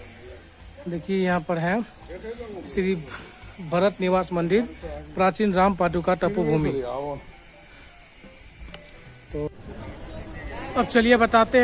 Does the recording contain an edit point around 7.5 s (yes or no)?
no